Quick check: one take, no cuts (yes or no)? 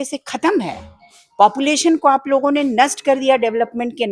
yes